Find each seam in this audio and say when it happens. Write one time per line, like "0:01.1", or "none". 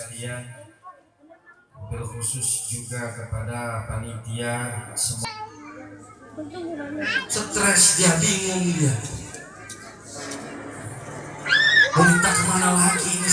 0:05.2